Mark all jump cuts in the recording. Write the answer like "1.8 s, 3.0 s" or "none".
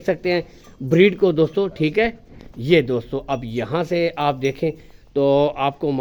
none